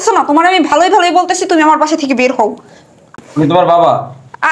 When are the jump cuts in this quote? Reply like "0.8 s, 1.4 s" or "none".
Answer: 3.1 s